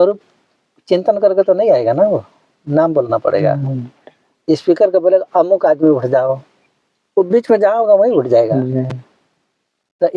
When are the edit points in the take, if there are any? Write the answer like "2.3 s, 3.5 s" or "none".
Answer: none